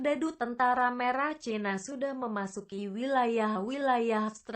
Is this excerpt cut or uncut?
cut